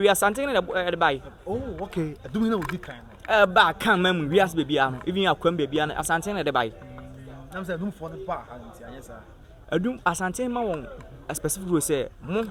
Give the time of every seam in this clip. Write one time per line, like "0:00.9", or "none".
none